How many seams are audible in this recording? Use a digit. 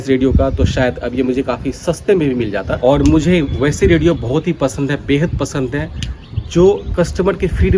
1